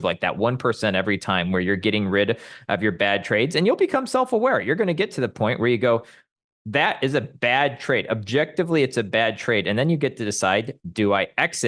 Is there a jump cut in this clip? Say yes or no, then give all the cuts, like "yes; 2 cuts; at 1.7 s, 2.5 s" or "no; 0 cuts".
no; 0 cuts